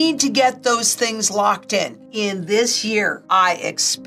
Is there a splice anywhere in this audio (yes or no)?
yes